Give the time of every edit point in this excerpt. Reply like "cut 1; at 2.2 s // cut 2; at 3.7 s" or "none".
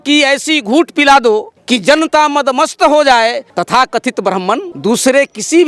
cut 1; at 1.5 s // cut 2; at 3.5 s // cut 3; at 4.7 s